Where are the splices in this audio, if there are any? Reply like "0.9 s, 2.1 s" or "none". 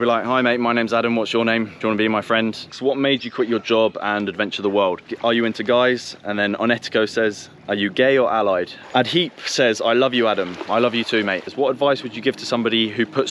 2.7 s, 5.1 s, 8.8 s, 11.5 s